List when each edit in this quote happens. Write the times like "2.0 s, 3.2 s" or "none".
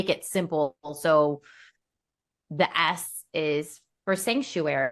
none

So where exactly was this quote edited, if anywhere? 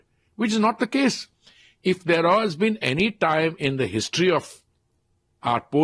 none

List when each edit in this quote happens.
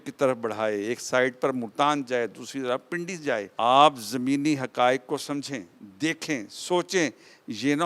3.5 s

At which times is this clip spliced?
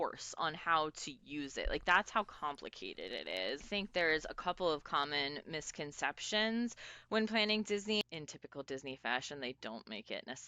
3.6 s, 8.0 s

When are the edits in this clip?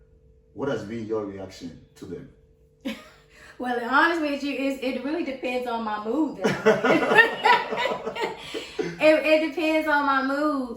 none

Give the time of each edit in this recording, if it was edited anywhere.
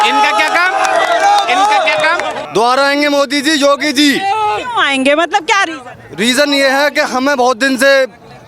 2.4 s

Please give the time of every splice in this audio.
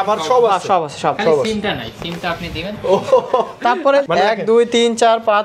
4.0 s

